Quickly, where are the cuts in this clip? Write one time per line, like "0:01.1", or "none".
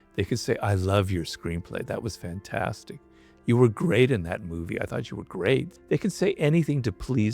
0:05.7